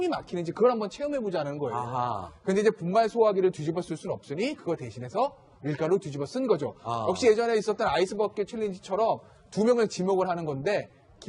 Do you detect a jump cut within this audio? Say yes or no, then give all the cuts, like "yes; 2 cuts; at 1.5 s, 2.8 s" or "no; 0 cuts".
yes; 1 cut; at 1.8 s